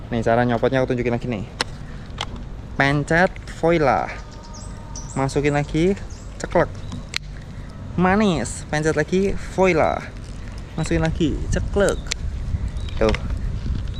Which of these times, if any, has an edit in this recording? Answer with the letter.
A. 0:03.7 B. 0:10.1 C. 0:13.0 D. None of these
D